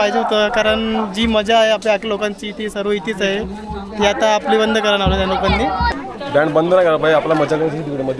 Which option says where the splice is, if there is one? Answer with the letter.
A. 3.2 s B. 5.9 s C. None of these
B